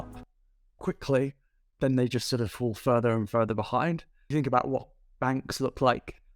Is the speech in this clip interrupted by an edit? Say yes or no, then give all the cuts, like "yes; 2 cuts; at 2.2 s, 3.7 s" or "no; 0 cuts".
yes; 1 cut; at 4.3 s